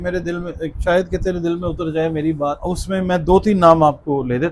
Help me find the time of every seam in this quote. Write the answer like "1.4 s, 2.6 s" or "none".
2.6 s